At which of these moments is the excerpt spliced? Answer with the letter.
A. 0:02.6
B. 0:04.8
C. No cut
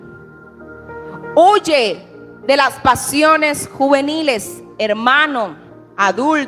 C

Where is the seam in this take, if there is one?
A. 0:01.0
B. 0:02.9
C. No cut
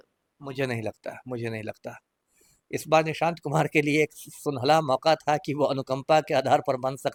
C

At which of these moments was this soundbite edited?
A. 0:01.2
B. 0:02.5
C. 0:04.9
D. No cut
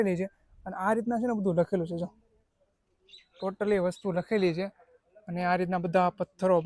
D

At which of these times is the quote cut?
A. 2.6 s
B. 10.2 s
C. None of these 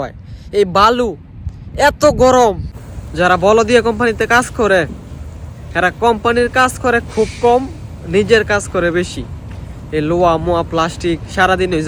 A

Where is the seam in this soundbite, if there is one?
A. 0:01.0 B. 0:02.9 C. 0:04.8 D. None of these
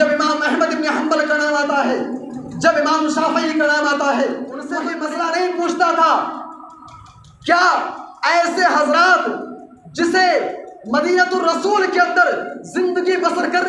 C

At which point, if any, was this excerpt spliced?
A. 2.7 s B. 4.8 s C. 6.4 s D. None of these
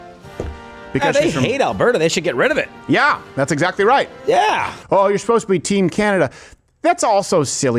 B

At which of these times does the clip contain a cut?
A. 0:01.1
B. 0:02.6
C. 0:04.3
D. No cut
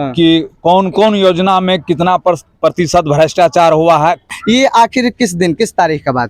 C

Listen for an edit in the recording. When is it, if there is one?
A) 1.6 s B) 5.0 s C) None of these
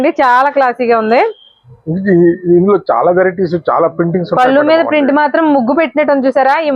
C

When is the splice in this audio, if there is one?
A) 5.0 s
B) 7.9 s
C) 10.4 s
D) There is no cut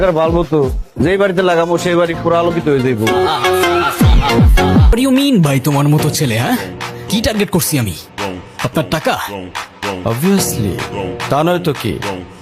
A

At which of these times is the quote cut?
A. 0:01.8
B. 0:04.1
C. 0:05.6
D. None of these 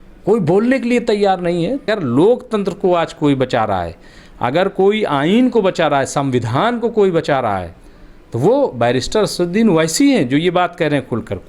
A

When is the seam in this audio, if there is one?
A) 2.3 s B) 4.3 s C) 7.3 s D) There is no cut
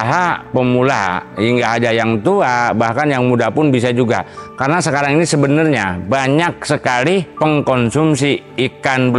D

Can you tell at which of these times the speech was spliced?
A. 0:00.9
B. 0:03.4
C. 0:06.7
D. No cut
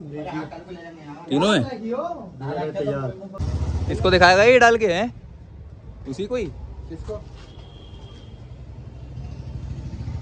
B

